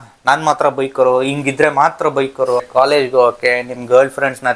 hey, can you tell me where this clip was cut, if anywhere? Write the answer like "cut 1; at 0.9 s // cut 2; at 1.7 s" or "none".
cut 1; at 2.6 s